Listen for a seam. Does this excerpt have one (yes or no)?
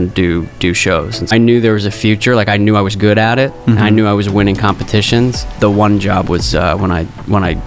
yes